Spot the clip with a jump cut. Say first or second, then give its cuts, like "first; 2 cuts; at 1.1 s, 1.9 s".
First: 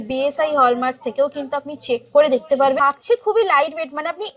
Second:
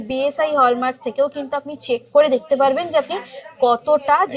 first; 1 cut; at 2.8 s